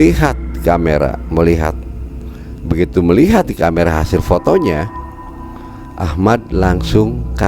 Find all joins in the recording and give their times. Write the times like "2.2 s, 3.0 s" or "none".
none